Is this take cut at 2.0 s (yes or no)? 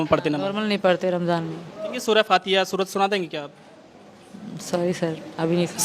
yes